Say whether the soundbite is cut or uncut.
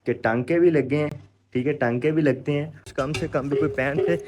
cut